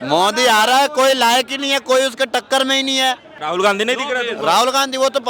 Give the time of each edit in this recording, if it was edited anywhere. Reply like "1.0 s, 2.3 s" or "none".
3.3 s

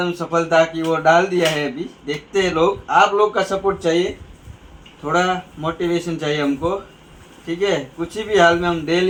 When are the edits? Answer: none

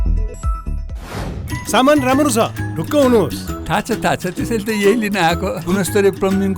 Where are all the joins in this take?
1.4 s

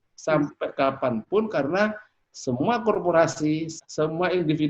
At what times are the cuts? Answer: 3.8 s

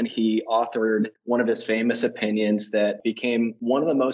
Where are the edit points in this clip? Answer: 1.2 s, 3.1 s

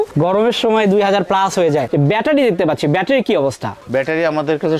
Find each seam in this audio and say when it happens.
1.9 s

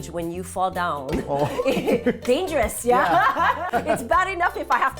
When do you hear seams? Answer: 3.7 s

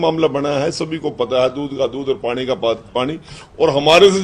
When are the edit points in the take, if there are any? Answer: none

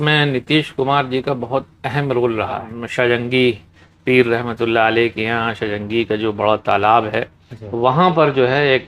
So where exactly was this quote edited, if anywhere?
2.8 s

